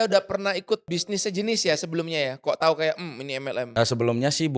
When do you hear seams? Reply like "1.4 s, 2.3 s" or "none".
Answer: 1.3 s, 3.7 s